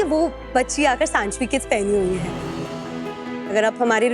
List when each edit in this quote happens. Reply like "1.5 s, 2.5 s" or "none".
none